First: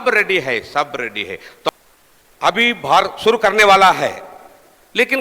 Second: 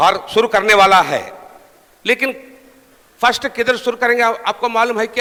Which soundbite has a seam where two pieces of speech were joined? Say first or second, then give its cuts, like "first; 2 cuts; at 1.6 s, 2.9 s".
first; 1 cut; at 1.7 s